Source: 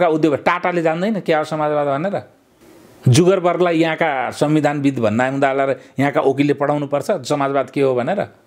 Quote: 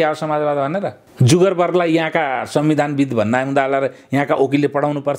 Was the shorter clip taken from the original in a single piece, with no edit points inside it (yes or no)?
no